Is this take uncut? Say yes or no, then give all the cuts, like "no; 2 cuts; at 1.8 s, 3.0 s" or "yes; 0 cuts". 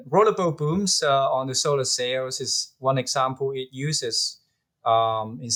yes; 0 cuts